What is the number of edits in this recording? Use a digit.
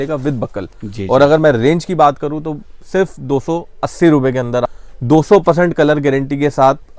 1